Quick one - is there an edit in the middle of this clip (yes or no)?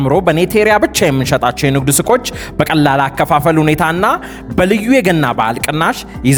no